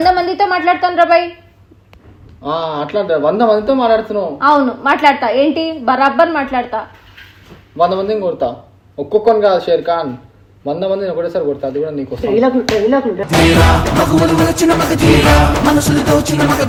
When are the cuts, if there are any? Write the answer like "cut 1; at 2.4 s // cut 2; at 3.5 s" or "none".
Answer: none